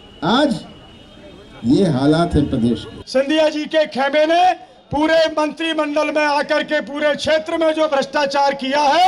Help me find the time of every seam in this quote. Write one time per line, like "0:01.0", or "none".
0:02.9